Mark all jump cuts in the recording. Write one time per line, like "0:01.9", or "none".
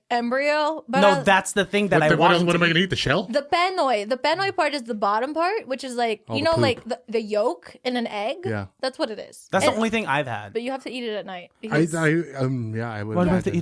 0:10.5

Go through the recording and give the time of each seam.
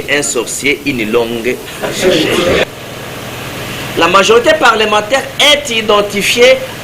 0:02.6

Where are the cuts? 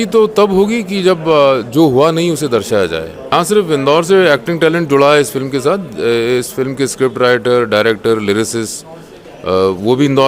0:03.2

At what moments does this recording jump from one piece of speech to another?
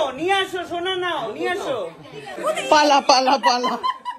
0:02.3

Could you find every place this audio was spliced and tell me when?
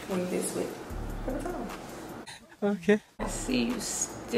0:03.3

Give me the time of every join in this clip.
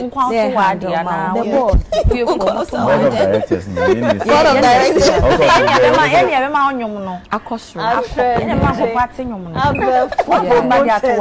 none

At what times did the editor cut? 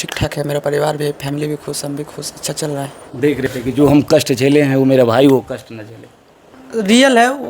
0:03.5

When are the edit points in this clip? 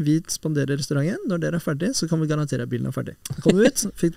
0:03.2

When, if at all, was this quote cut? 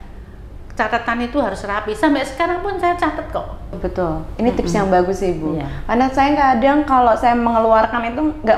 0:03.7

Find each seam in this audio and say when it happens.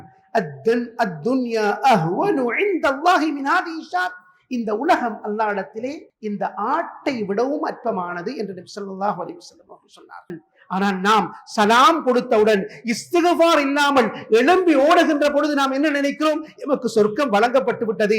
0:10.4

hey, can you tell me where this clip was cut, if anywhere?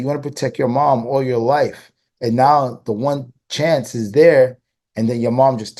none

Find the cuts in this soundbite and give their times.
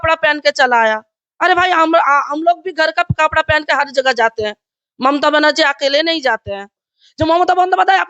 0:06.9

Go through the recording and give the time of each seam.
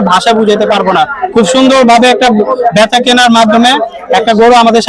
none

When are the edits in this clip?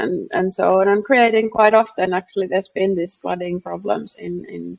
none

